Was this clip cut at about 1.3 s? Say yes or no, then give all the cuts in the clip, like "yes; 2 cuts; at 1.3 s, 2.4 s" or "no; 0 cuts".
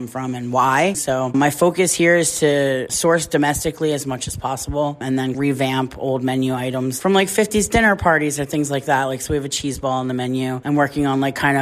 yes; 2 cuts; at 1.3 s, 5.3 s